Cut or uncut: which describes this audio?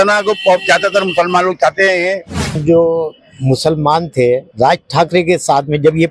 cut